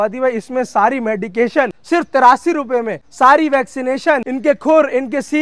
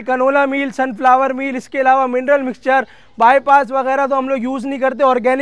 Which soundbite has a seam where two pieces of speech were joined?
first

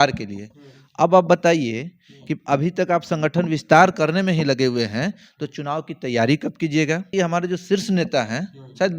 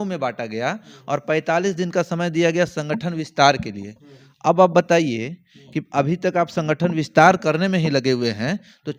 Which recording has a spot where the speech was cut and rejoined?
first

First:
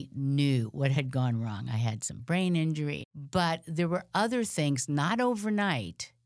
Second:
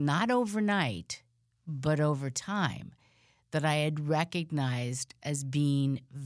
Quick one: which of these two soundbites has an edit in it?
first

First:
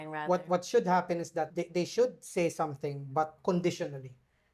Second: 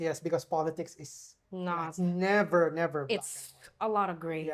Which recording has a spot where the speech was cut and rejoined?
first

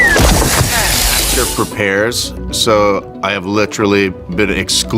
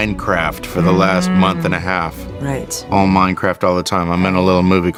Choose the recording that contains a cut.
first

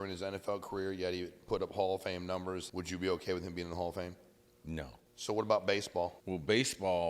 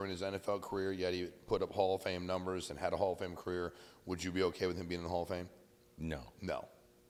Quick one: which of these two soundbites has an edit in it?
first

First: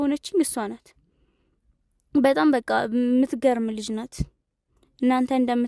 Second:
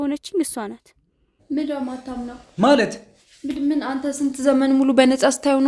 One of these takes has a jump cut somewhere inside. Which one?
second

